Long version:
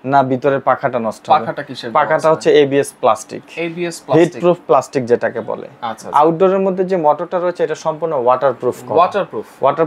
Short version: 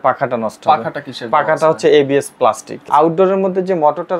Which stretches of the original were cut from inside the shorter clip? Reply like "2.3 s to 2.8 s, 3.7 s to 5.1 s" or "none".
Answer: 3.3 s to 5.9 s